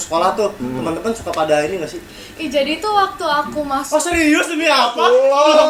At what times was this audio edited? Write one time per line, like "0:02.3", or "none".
none